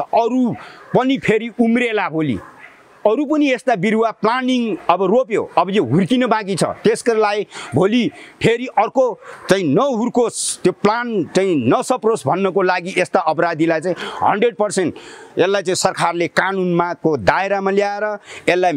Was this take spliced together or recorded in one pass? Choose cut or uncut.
uncut